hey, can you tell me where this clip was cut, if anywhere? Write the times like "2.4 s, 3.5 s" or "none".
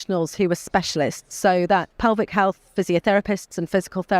1.9 s

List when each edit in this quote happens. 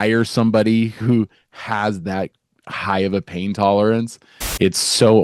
1.0 s, 4.4 s

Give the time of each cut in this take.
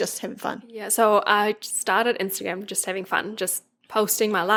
none

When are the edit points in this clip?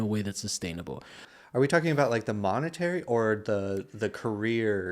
1.2 s

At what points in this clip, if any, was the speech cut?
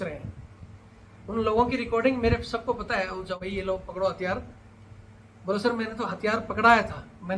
3.4 s

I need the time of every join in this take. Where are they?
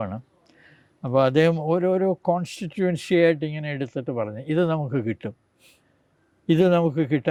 none

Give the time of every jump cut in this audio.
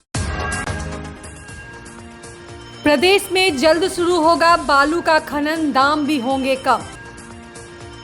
none

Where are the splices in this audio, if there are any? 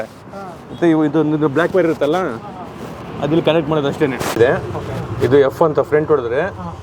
4.3 s

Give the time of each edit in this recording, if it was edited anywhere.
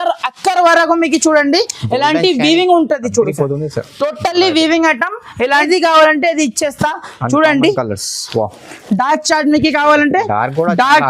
5.7 s

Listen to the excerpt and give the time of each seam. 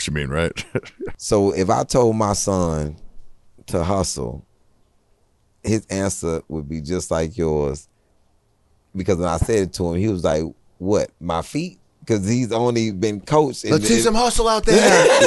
1.0 s

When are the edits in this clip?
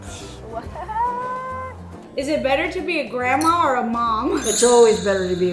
2.0 s

